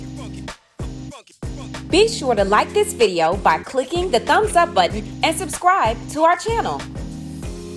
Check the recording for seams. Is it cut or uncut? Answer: cut